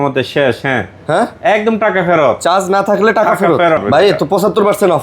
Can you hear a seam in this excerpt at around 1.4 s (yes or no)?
no